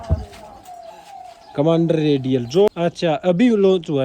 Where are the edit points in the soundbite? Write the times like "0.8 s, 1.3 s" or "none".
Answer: 2.7 s